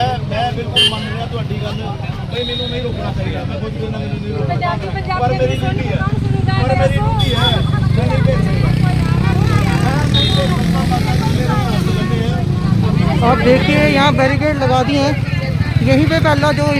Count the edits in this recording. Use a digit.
0